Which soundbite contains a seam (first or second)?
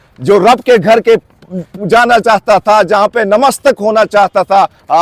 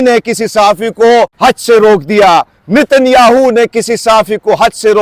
second